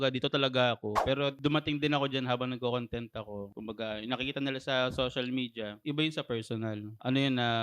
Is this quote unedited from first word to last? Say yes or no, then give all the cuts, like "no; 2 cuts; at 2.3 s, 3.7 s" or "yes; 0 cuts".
no; 1 cut; at 1.0 s